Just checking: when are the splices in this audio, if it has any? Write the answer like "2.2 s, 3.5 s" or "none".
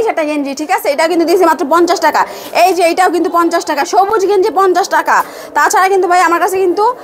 none

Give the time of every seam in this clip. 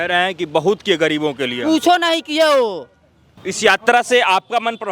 3.4 s

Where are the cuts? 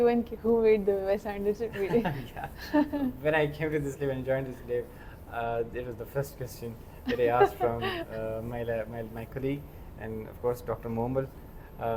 none

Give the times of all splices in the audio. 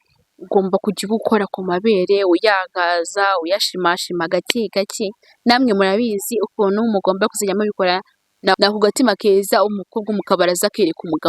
8.6 s

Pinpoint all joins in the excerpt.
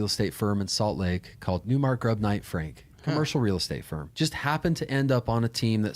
1.6 s, 4.0 s

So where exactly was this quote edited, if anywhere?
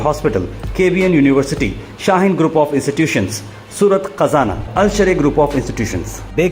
none

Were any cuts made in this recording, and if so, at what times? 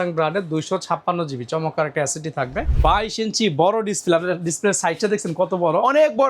2.6 s

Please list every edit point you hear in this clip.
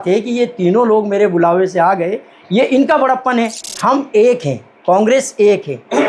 3.6 s

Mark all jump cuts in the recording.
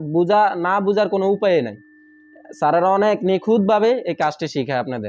none

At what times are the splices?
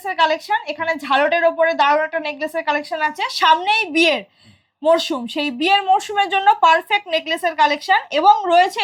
none

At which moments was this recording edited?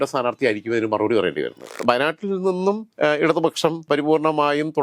1.7 s, 2.9 s, 3.9 s

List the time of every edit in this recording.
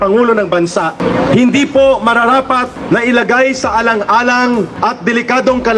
1.0 s, 2.7 s, 4.7 s

